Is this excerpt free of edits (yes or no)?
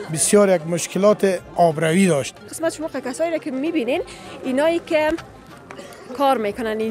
no